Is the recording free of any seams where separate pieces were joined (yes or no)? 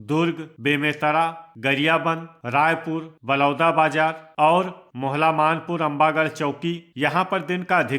no